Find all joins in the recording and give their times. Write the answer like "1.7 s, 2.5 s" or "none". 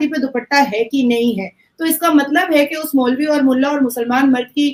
none